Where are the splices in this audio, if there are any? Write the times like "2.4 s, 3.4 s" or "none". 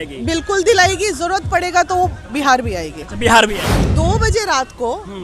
3.9 s